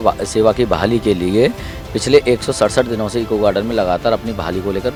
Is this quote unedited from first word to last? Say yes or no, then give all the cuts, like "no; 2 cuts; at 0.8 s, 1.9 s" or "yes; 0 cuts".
yes; 0 cuts